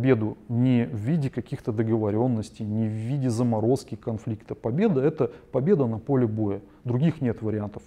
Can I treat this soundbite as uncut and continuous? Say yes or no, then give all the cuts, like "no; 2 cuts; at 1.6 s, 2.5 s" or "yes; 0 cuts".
yes; 0 cuts